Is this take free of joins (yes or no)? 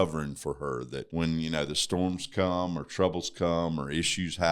no